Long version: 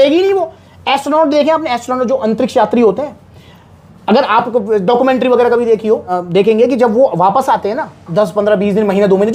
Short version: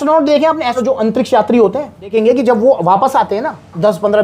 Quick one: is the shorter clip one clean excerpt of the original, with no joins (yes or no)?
no